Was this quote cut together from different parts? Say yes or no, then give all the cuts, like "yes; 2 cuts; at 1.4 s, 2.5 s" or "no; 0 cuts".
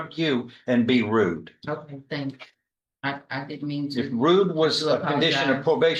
no; 0 cuts